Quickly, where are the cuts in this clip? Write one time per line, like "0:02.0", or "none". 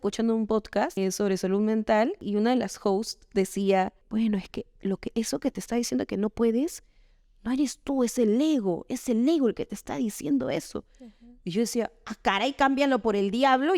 0:01.0
0:02.2
0:04.0